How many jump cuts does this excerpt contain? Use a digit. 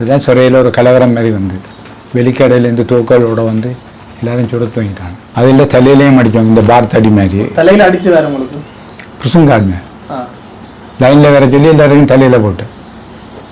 1